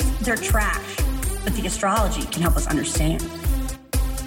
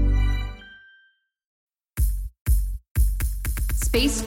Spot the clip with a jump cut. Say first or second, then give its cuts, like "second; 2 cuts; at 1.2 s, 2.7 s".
second; 1 cut; at 1.6 s